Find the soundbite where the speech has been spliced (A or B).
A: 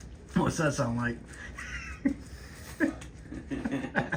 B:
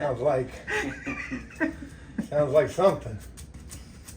B